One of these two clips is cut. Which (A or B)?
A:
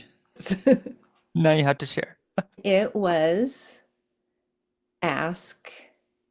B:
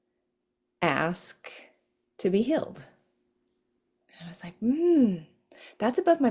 A